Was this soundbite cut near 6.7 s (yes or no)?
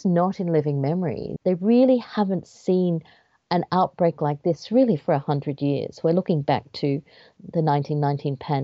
no